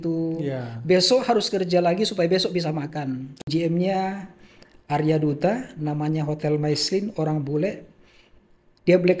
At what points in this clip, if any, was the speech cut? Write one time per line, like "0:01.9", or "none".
0:03.3